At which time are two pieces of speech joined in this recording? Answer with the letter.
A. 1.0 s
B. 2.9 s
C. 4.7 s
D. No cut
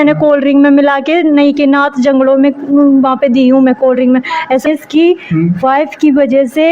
C